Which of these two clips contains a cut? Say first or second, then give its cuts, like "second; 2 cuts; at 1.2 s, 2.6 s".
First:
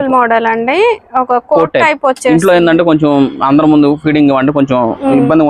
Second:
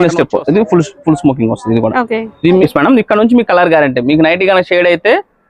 second; 1 cut; at 2.7 s